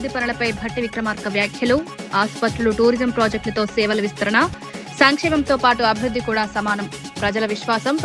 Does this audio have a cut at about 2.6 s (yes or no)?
no